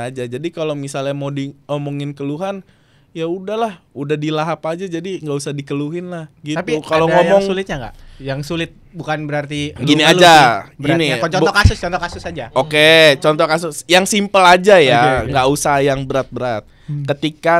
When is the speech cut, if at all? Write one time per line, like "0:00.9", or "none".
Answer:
none